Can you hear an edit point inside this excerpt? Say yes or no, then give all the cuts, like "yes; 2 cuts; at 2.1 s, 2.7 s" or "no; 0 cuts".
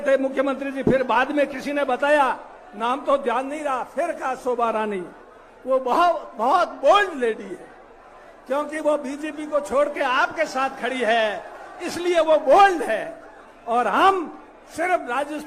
no; 0 cuts